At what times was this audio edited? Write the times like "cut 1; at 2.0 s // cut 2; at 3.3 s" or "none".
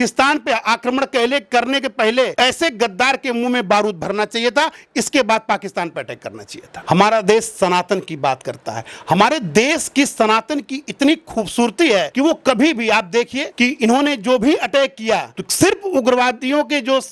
none